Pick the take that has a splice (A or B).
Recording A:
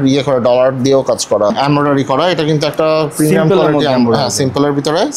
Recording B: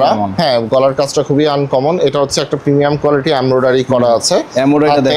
A